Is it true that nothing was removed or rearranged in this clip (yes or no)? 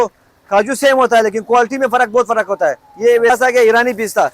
no